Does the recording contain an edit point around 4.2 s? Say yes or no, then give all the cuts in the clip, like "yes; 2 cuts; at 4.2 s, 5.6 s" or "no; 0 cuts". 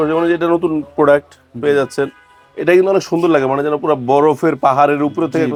no; 0 cuts